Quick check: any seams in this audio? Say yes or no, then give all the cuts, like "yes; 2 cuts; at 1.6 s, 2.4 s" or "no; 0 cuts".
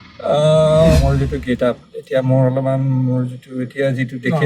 yes; 1 cut; at 1.0 s